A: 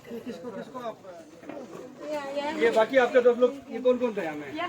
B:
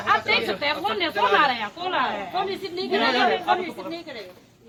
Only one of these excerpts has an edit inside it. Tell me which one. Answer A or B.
A